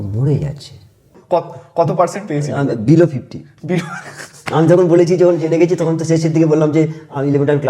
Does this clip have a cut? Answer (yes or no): yes